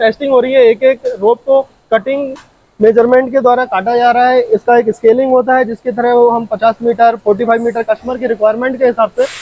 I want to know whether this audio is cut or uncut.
uncut